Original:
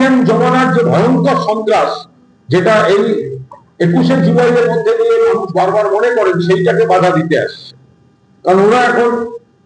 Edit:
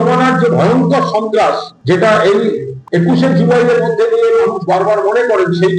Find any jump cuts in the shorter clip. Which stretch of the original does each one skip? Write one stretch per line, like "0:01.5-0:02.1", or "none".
0:02.0-0:02.3
0:03.4-0:03.6

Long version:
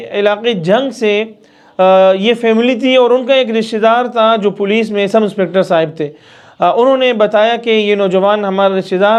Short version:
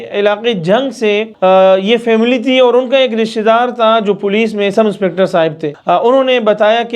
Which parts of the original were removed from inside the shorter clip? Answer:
0:01.3-0:01.7
0:06.1-0:06.4

